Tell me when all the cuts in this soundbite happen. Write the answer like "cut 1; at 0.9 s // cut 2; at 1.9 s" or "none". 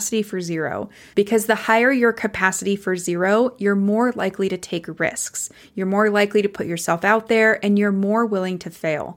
cut 1; at 1.0 s

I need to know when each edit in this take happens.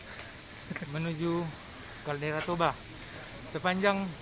none

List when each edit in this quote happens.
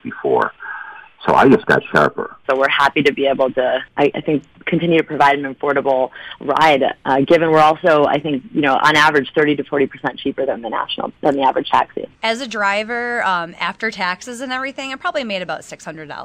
cut 1; at 2.3 s // cut 2; at 3.9 s // cut 3; at 12.1 s

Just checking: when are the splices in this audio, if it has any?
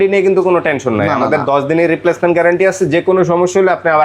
none

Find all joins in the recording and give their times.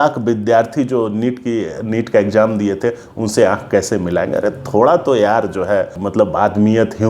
cut 1; at 6.0 s

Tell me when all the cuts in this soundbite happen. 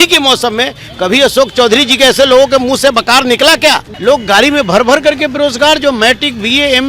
cut 1; at 3.9 s

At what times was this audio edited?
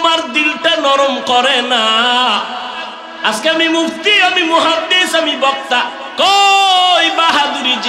cut 1; at 3.1 s

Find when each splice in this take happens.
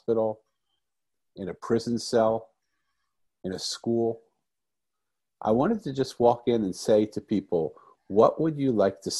none

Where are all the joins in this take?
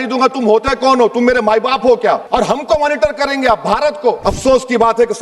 cut 1; at 2.2 s // cut 2; at 4.3 s

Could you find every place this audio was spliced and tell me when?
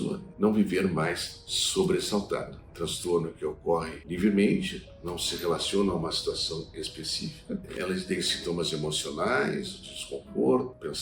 cut 1; at 2.6 s // cut 2; at 4.0 s // cut 3; at 7.7 s

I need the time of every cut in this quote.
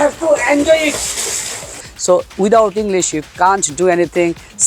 cut 1; at 1.9 s

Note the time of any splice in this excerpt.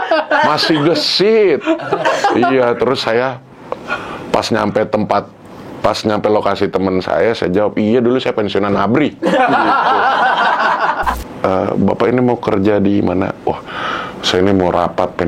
cut 1; at 11.2 s

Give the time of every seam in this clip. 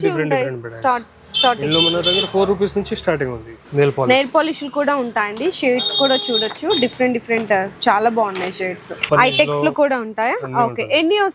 cut 1; at 3.7 s // cut 2; at 9.1 s

